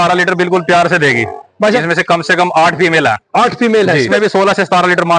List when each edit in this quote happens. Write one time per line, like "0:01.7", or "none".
0:01.8
0:04.1